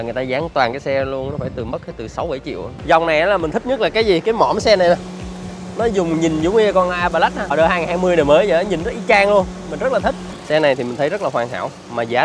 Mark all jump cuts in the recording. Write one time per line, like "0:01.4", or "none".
0:02.7
0:07.5
0:10.3